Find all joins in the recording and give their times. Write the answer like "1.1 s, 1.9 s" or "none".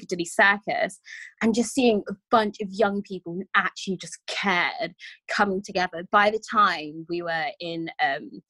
none